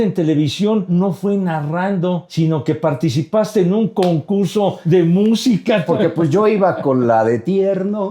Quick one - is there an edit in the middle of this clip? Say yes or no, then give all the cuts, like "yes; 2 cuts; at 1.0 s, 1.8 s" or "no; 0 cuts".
yes; 4 cuts; at 0.9 s, 2.3 s, 4.8 s, 5.9 s